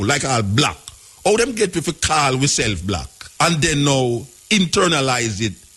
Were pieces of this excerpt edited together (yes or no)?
yes